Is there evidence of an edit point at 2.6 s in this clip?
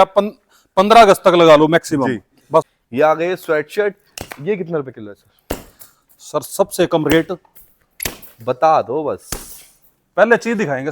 yes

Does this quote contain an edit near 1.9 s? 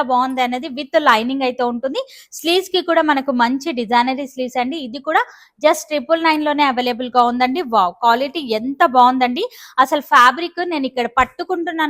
no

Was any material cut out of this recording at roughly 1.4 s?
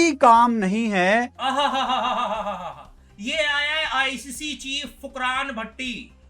yes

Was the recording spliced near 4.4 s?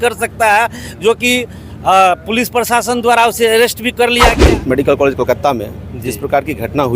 yes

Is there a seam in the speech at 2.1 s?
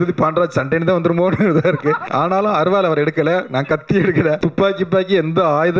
yes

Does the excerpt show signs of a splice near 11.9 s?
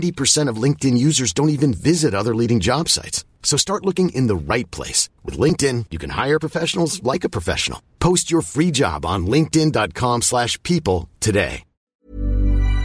yes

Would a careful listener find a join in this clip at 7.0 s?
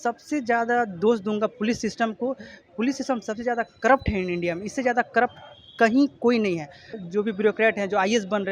yes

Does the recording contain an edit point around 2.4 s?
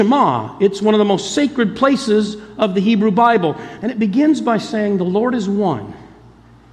no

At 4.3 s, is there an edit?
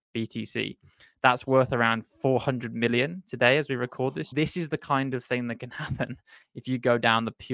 yes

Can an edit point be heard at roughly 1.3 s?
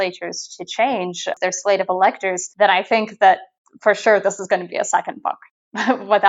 yes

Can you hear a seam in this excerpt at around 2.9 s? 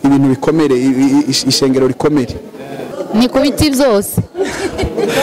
yes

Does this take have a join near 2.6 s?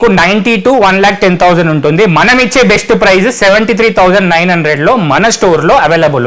no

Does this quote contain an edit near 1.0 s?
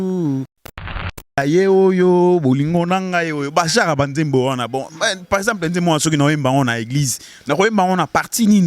yes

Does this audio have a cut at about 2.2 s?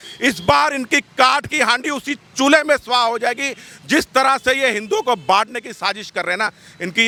no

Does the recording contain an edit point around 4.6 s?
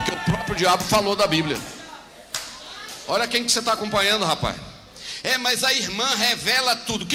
no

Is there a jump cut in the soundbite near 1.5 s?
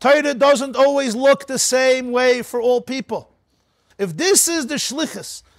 no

